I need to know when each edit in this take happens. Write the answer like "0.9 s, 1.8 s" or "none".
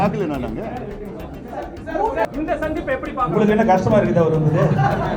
2.3 s